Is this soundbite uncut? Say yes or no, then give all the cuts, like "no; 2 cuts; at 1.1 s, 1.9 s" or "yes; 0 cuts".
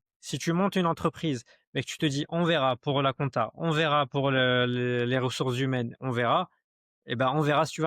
yes; 0 cuts